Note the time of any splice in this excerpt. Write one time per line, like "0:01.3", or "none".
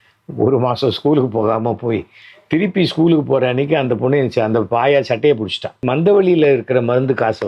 0:05.8